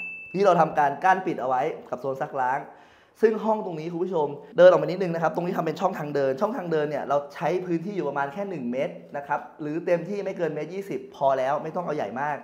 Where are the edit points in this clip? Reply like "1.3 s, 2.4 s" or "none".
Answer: 4.4 s